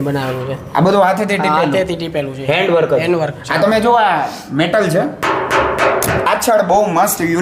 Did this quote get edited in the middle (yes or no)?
yes